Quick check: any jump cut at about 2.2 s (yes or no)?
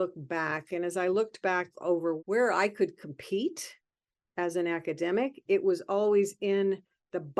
yes